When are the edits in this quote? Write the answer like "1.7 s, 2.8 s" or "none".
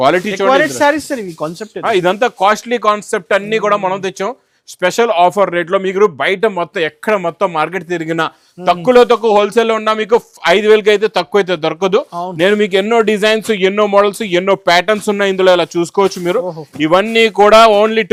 none